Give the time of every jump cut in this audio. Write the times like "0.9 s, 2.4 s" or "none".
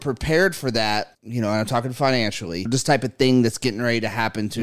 1.2 s, 2.7 s